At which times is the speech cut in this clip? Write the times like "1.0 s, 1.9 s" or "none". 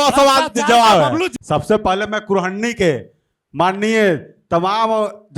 1.3 s